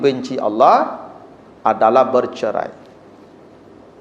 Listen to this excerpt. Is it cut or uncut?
uncut